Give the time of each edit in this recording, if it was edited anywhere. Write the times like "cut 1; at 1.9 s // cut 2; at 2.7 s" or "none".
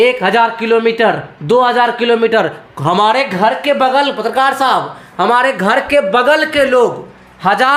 none